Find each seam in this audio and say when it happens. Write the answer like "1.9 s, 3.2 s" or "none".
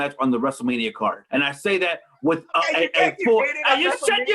1.2 s